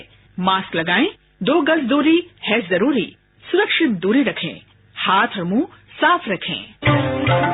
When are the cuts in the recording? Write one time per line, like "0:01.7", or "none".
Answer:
none